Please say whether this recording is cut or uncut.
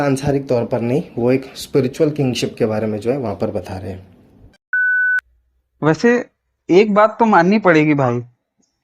cut